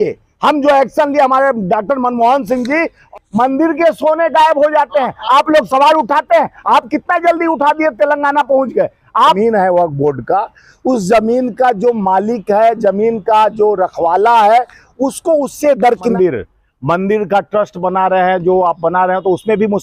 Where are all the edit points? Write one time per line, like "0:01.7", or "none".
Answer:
0:03.0
0:09.4
0:16.1